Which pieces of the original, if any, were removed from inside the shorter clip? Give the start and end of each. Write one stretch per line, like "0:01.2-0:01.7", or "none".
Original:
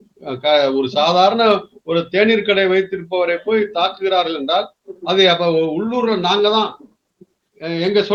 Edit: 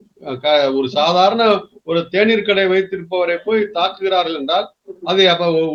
none